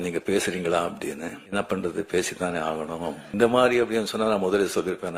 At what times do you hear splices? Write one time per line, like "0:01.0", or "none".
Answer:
0:01.4
0:03.3